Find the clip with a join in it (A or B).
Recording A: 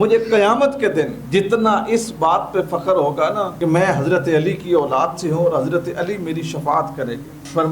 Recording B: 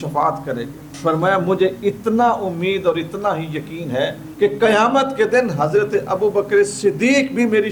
A